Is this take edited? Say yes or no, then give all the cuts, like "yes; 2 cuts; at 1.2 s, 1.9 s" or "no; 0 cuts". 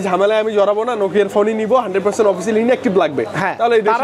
no; 0 cuts